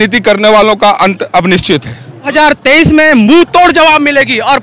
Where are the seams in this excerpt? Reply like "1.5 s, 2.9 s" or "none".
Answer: 2.3 s